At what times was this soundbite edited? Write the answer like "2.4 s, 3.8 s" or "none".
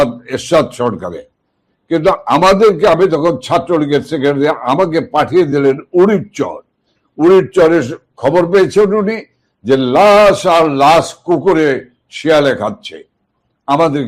none